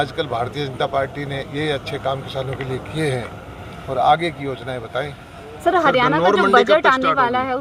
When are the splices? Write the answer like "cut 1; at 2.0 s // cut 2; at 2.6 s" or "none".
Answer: none